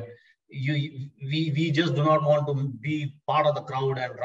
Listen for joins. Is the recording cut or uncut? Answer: uncut